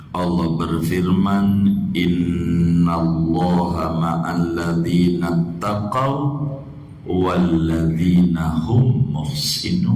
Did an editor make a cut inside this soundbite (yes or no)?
no